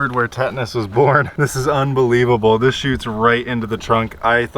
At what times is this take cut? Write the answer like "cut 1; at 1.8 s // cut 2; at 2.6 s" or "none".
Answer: cut 1; at 1.3 s